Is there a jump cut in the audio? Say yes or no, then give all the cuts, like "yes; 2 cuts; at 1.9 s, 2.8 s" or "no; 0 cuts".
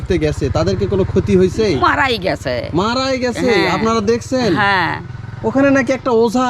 no; 0 cuts